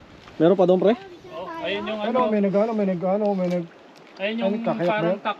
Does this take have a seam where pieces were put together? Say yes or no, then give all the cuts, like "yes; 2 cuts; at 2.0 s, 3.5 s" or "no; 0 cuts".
no; 0 cuts